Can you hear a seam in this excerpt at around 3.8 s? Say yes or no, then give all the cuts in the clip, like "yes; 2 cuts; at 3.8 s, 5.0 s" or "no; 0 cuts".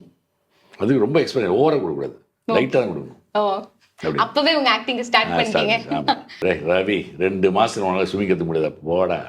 no; 1 cut; at 6.4 s